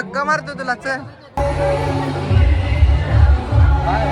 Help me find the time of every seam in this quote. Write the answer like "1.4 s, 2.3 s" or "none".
1.2 s